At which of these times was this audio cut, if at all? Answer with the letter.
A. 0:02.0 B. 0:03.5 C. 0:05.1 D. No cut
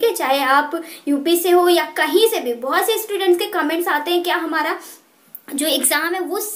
D